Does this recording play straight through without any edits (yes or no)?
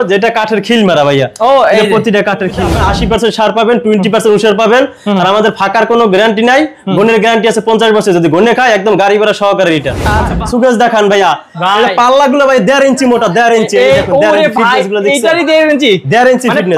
no